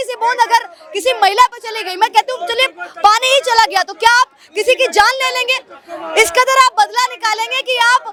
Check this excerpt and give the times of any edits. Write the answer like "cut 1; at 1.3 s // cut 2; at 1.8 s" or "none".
none